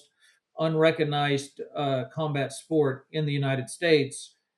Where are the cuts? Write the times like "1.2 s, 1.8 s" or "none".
none